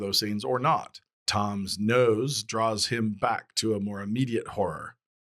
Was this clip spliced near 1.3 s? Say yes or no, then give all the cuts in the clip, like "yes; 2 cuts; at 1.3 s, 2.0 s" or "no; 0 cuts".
yes; 1 cut; at 1.3 s